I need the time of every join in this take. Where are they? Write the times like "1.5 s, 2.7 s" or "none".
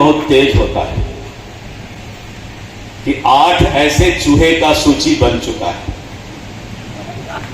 1.9 s